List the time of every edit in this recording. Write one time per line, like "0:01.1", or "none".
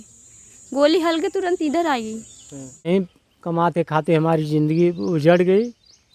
0:02.9